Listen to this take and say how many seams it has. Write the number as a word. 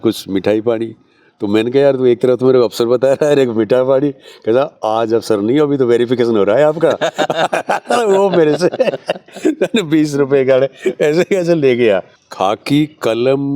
one